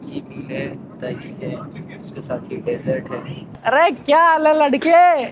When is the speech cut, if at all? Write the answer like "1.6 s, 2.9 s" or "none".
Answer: 3.4 s